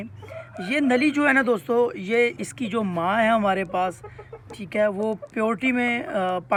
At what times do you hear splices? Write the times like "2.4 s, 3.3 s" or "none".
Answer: none